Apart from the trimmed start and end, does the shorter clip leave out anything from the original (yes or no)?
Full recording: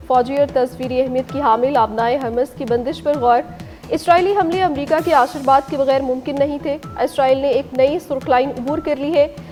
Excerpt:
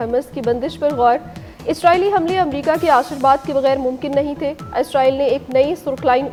no